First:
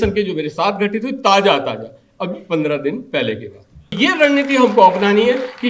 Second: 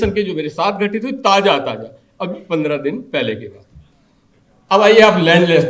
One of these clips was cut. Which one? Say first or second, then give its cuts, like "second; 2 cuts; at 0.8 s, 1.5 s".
first; 1 cut; at 4.0 s